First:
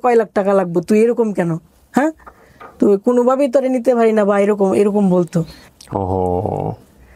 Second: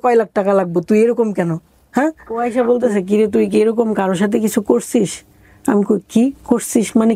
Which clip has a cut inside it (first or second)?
second